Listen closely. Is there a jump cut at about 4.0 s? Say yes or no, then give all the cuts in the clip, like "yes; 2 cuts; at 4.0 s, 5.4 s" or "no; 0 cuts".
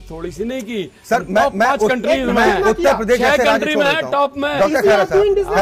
no; 0 cuts